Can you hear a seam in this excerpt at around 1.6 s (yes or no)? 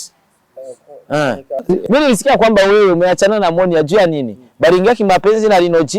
yes